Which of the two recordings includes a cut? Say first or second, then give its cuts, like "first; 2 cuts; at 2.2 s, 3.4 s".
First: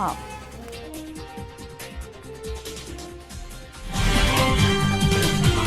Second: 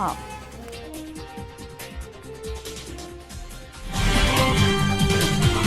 second; 2 cuts; at 1.8 s, 4.5 s